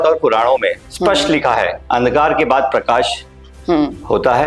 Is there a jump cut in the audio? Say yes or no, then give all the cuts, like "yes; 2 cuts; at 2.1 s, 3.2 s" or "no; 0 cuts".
no; 0 cuts